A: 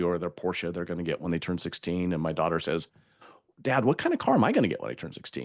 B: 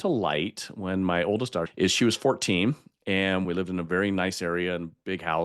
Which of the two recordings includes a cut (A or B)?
B